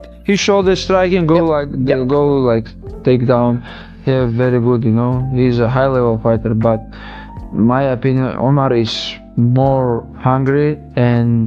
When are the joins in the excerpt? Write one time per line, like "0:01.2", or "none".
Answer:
0:03.6